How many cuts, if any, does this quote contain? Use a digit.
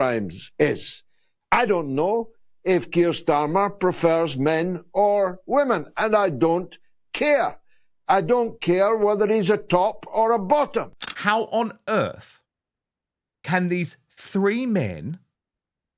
1